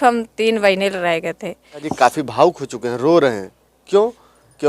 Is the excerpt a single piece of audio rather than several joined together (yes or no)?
no